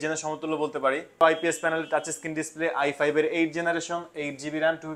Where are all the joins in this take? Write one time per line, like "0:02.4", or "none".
0:01.2